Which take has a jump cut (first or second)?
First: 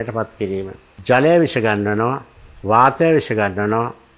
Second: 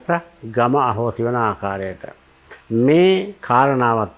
second